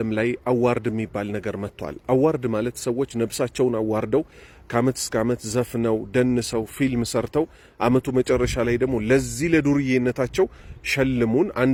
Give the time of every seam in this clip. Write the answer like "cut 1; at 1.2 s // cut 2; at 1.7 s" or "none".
none